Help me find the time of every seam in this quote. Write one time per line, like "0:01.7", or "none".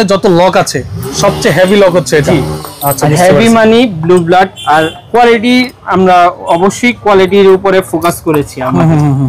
none